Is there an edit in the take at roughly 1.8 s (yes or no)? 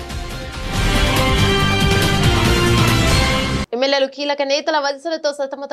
no